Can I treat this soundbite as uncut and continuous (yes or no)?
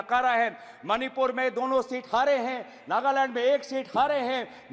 yes